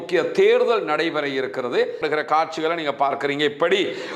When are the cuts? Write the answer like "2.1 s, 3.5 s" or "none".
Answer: 2.0 s